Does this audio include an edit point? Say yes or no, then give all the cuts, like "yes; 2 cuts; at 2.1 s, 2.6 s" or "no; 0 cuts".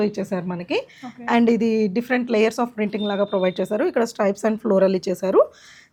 no; 0 cuts